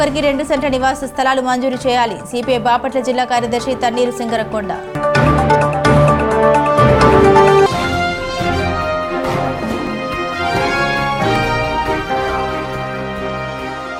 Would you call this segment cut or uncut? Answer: uncut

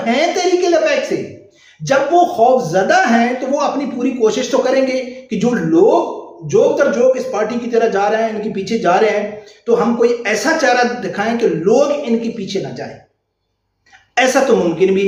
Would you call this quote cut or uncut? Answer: uncut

